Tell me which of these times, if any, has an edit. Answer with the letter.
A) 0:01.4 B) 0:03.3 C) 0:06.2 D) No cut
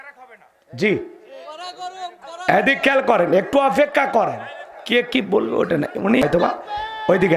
C